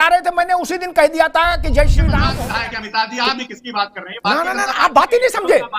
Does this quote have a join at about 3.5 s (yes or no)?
no